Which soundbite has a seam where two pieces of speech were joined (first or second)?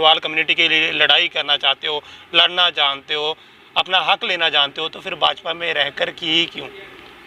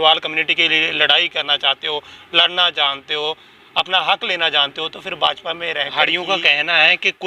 second